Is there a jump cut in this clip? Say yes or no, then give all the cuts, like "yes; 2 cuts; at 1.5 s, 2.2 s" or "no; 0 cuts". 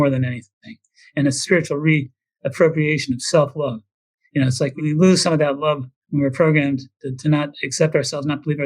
yes; 2 cuts; at 1.4 s, 4.7 s